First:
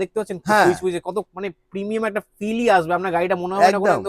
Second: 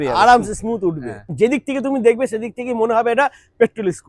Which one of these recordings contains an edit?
second; 1 cut; at 1.3 s

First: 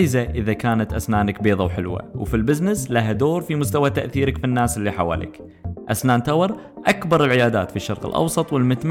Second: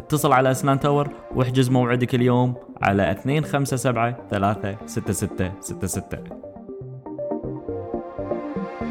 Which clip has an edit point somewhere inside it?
second; 1 cut; at 6.2 s

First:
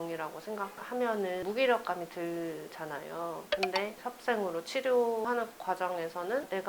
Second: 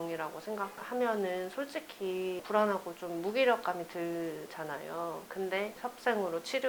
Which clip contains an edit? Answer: first; 2 cuts; at 1.4 s, 5.2 s

